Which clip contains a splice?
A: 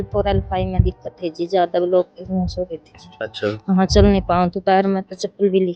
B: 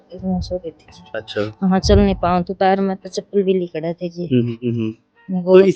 B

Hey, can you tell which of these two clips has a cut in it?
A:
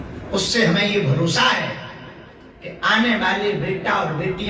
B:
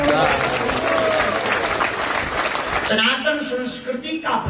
B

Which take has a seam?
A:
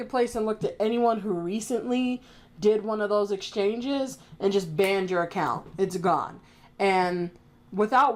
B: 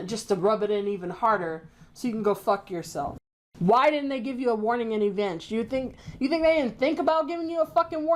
B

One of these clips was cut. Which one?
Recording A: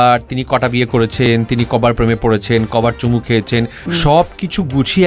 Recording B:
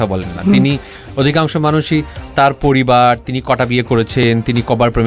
A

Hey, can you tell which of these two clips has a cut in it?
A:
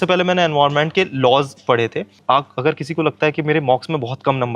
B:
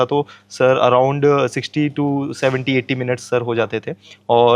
A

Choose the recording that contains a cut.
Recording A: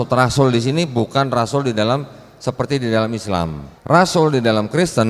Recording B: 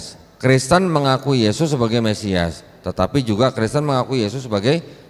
A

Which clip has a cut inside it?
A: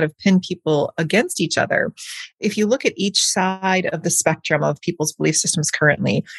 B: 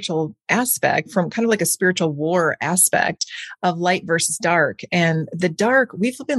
B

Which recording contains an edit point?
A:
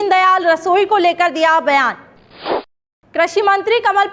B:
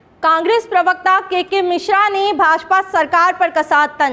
A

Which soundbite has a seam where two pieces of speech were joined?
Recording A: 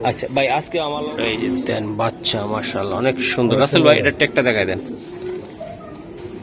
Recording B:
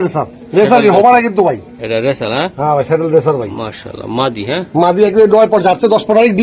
A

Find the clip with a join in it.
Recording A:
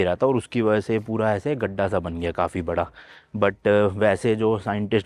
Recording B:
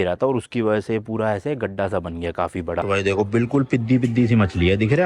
B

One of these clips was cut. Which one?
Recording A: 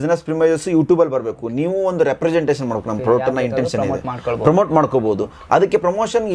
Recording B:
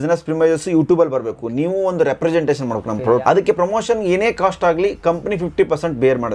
B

